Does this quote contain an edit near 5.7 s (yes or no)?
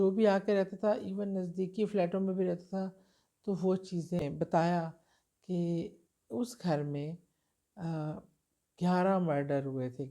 no